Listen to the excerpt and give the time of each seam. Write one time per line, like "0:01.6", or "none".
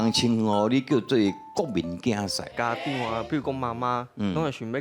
0:02.5